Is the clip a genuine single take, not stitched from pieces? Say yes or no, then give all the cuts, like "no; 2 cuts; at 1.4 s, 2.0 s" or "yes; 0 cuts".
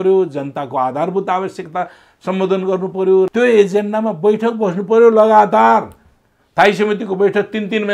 no; 1 cut; at 3.3 s